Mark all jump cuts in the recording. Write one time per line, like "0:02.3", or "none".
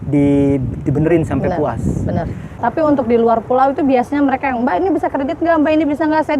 0:02.6